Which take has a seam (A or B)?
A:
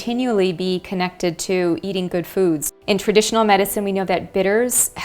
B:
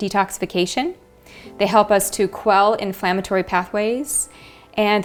A